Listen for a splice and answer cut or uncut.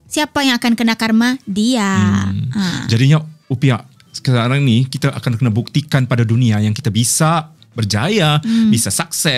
uncut